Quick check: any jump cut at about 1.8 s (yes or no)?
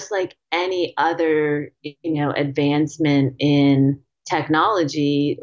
no